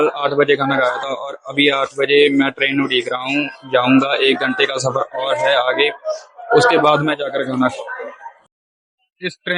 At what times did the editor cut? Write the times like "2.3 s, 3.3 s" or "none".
8.5 s

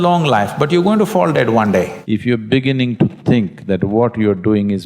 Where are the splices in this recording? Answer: 2.0 s

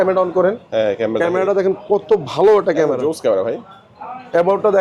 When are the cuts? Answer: none

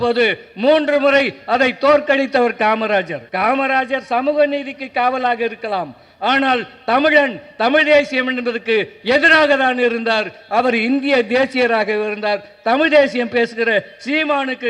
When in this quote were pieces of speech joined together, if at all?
3.2 s

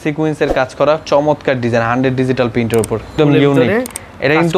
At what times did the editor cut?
3.1 s

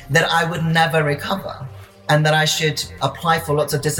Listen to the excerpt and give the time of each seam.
2.0 s

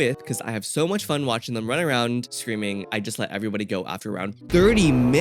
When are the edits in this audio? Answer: 2.7 s

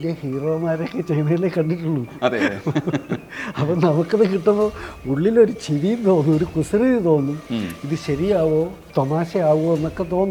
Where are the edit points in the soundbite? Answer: none

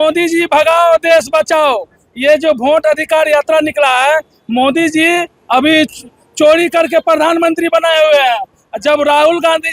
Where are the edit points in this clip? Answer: none

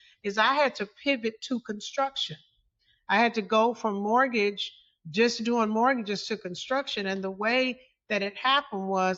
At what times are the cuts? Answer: none

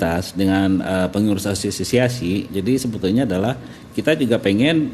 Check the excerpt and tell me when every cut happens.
none

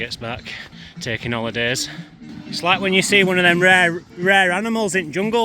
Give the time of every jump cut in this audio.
2.4 s

